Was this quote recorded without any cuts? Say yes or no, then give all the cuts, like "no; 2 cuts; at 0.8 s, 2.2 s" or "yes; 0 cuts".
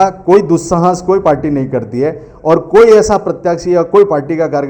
yes; 0 cuts